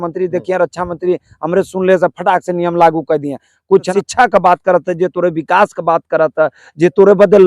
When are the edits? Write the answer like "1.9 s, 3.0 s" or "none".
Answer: 3.9 s